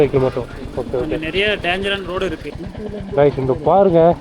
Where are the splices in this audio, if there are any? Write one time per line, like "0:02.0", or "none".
0:02.5

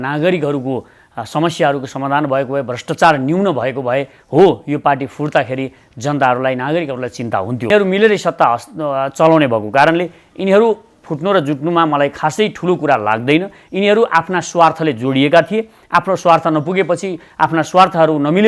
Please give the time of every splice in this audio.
0:07.7

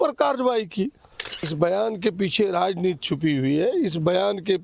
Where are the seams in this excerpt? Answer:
0:01.5

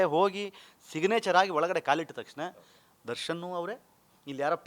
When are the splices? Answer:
none

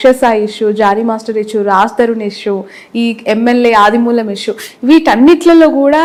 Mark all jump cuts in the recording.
none

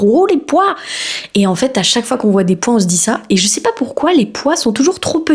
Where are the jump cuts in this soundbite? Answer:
none

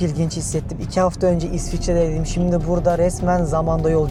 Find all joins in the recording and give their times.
none

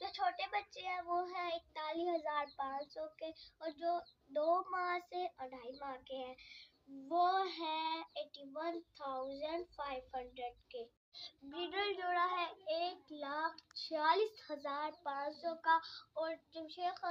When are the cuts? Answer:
none

